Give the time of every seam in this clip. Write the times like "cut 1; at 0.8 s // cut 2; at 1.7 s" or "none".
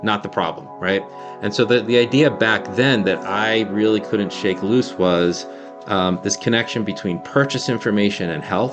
cut 1; at 1.2 s